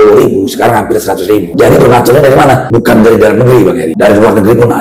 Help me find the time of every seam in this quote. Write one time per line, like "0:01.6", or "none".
0:01.5
0:02.7
0:03.9